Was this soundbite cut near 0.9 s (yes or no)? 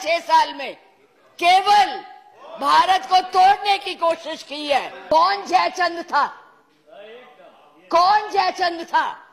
no